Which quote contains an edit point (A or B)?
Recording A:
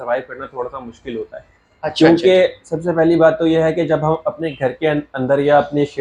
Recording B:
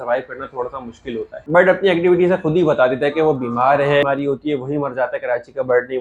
B